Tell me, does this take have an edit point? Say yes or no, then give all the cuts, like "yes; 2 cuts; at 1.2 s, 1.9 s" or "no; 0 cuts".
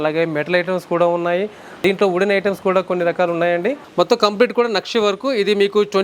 yes; 2 cuts; at 1.8 s, 3.8 s